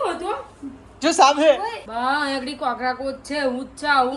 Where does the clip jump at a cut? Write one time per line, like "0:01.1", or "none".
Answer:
0:01.8